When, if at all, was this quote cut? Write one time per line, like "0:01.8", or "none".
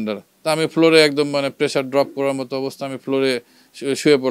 none